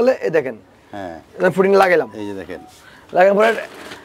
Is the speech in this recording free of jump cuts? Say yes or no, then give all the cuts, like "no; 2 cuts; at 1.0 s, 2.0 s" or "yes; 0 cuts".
yes; 0 cuts